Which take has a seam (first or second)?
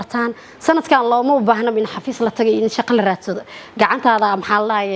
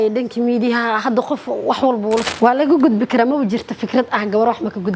second